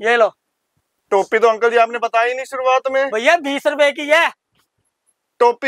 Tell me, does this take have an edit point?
no; 0 cuts

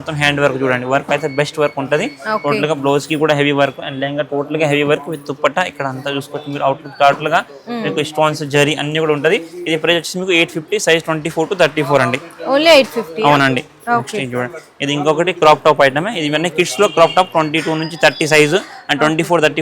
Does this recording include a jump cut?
no; 0 cuts

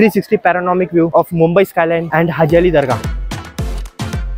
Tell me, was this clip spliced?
yes; 3 cuts; at 1.1 s, 2.1 s, 3.0 s

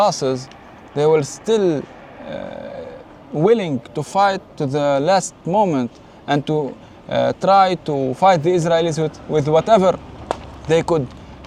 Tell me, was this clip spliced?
no; 0 cuts

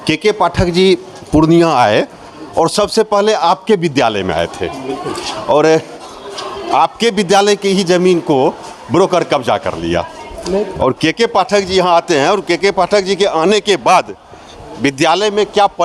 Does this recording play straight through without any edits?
yes; 0 cuts

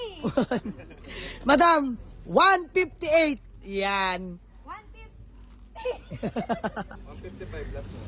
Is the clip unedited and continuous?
no; 1 cut; at 6.7 s

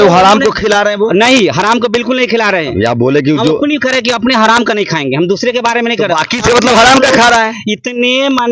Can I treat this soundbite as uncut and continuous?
yes; 0 cuts

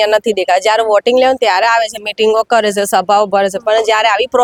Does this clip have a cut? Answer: no; 0 cuts

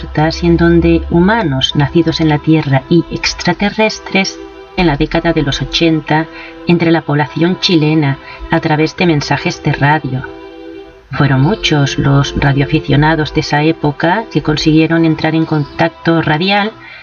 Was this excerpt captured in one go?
yes; 0 cuts

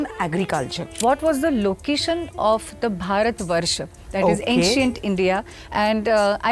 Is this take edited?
yes; 1 cut; at 1.0 s

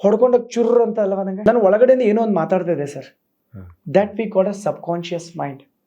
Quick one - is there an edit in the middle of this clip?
yes; 1 cut; at 1.3 s

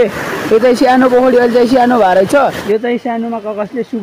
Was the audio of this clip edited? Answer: yes; 1 cut; at 2.6 s

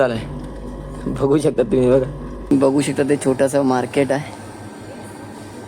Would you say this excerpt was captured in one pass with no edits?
no; 1 cut; at 2.5 s

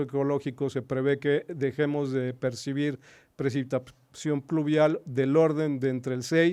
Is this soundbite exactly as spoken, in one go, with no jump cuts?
yes; 0 cuts

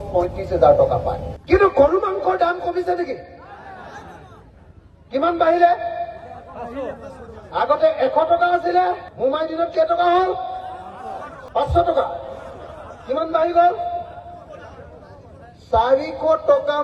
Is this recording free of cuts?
no; 2 cuts; at 9.1 s, 11.4 s

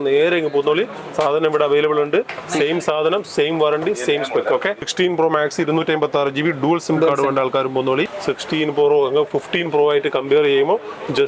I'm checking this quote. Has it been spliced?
yes; 2 cuts; at 4.8 s, 8.1 s

